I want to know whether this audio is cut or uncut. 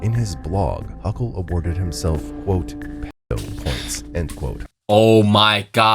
cut